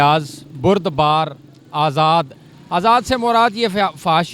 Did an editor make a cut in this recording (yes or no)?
no